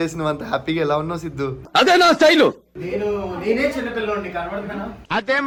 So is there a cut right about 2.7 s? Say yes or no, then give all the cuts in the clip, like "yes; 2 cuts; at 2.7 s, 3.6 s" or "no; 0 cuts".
no; 0 cuts